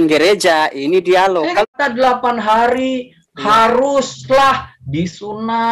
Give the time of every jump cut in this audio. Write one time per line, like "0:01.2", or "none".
0:01.7